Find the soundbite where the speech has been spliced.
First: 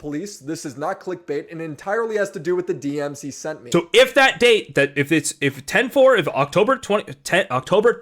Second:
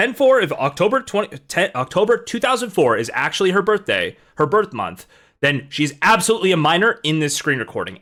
first; 1 cut; at 3.6 s

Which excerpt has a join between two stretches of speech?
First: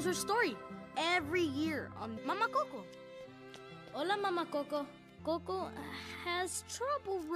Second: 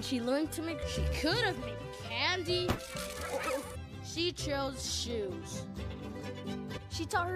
first; 1 cut; at 5.0 s

